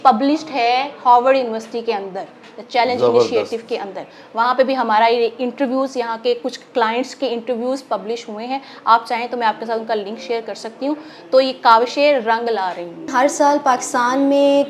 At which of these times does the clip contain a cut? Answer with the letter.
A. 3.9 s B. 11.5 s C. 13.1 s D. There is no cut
C